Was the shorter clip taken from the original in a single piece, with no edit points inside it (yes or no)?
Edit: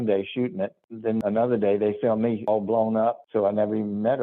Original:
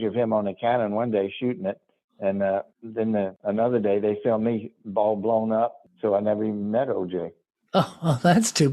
no